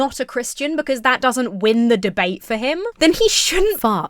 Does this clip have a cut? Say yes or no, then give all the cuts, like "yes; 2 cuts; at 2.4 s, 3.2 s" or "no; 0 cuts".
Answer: yes; 1 cut; at 2.9 s